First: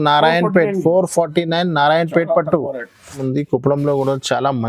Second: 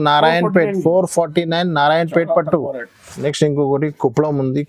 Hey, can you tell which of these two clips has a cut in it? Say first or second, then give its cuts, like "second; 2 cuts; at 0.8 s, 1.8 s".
first; 1 cut; at 3.2 s